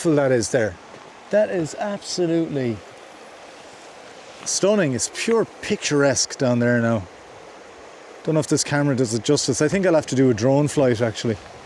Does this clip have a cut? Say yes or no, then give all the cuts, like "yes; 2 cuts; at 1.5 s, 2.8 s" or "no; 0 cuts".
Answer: no; 0 cuts